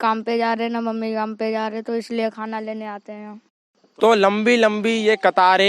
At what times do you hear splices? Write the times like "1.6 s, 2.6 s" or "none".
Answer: 3.9 s

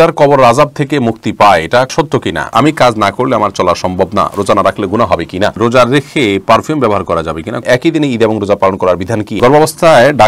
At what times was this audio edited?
2.0 s, 5.6 s, 7.6 s, 9.4 s

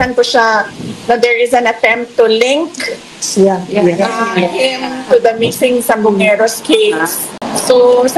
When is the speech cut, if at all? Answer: none

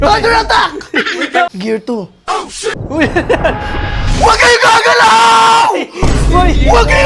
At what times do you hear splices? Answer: 1.5 s, 2.8 s

